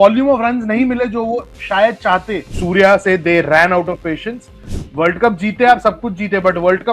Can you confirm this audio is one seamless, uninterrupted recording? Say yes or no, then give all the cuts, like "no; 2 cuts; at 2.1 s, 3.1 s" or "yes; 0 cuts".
no; 1 cut; at 2.5 s